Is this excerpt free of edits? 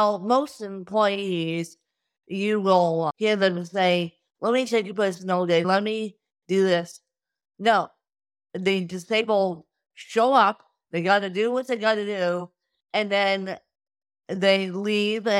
no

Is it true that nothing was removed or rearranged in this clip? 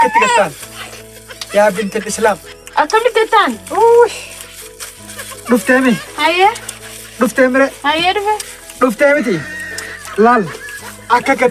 yes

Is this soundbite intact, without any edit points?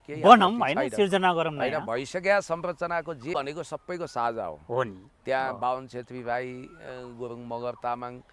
no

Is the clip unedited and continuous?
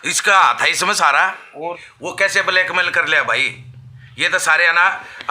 no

